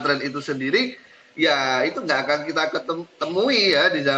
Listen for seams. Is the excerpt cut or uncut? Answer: uncut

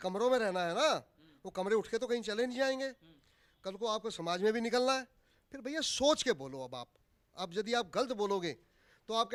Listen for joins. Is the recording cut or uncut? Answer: uncut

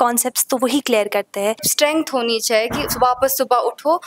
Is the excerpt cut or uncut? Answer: cut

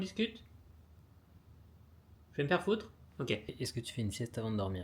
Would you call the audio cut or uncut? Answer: cut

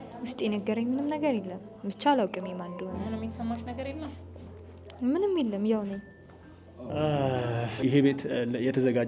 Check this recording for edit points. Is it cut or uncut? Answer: uncut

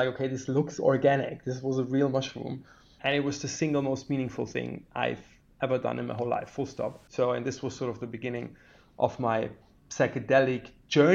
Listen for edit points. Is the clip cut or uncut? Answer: cut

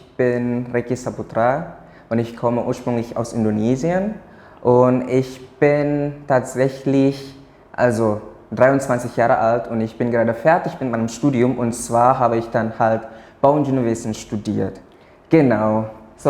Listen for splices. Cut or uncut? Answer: uncut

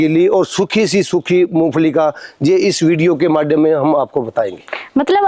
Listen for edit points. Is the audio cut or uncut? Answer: uncut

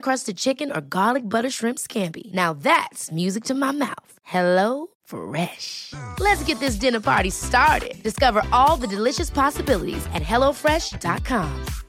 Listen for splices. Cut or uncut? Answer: uncut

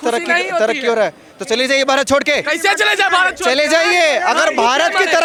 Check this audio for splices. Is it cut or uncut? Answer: uncut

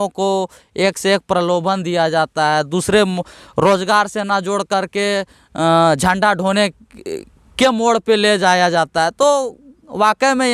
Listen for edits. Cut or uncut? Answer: uncut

